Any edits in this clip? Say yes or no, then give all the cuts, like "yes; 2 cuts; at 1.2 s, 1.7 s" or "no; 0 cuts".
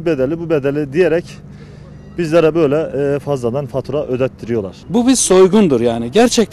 yes; 1 cut; at 4.8 s